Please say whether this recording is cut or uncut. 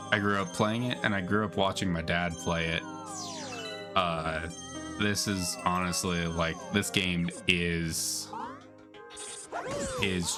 uncut